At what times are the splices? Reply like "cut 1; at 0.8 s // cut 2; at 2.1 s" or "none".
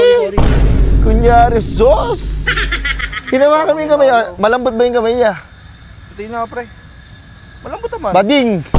none